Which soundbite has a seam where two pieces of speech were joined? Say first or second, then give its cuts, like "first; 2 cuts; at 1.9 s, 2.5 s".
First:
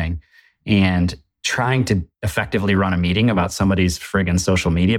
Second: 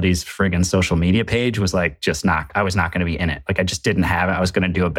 first; 1 cut; at 2.2 s